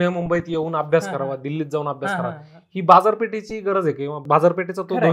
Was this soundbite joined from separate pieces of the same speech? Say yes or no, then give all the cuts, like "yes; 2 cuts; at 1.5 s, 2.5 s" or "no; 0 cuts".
yes; 1 cut; at 4.2 s